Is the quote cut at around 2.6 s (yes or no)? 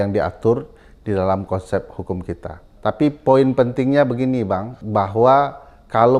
no